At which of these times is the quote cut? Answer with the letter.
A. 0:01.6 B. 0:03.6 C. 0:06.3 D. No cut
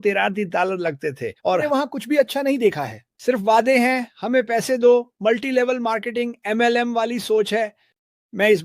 A